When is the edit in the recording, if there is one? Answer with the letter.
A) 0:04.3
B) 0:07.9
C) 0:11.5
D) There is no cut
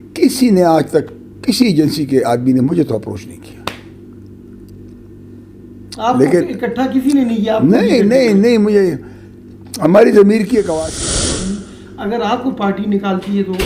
C